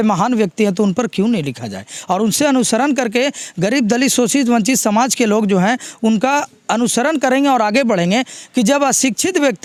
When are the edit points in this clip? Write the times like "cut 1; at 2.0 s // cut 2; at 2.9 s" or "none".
none